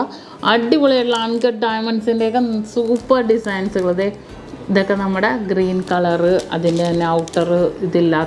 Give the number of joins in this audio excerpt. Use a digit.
0